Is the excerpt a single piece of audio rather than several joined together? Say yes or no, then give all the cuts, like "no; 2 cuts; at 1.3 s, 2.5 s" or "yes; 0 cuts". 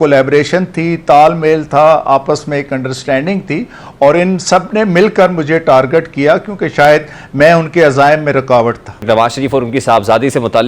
no; 1 cut; at 9.0 s